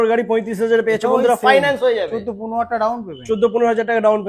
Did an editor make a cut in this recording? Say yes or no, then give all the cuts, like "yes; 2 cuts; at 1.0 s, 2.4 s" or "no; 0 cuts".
no; 0 cuts